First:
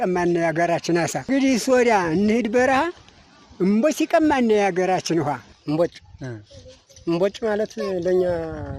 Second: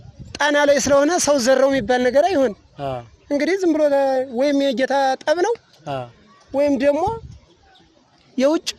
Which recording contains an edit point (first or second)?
first